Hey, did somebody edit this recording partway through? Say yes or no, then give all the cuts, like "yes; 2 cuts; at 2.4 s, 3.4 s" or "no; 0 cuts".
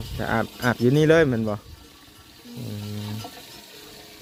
no; 0 cuts